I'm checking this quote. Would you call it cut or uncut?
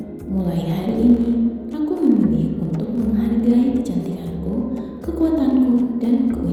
uncut